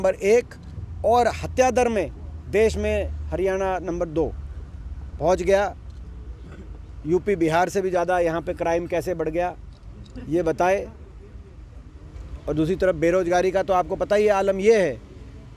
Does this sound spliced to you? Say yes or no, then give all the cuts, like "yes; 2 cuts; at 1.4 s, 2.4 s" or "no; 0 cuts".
no; 0 cuts